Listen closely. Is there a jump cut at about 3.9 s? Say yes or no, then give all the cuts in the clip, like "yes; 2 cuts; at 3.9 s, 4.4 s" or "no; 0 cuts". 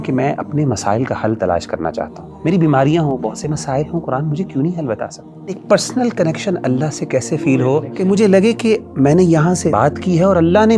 no; 4 cuts; at 2.2 s, 5.6 s, 7.9 s, 9.7 s